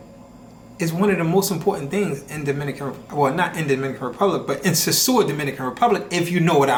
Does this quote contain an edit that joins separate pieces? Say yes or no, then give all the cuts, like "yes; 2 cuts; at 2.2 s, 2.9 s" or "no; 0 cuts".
no; 0 cuts